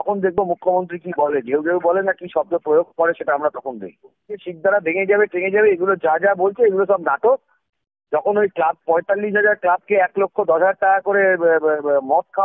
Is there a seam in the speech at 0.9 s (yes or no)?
no